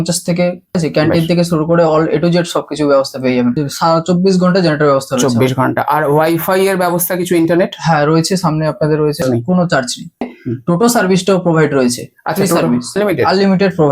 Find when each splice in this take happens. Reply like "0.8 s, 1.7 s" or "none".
0.8 s, 3.6 s, 9.2 s, 10.3 s, 13.0 s